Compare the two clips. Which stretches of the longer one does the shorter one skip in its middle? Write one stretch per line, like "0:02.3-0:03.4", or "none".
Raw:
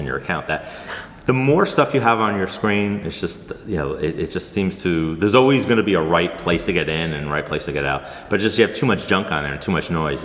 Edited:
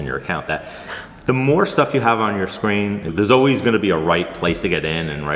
0:03.1-0:05.1